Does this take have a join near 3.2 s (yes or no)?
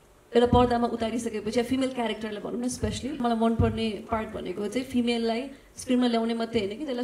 yes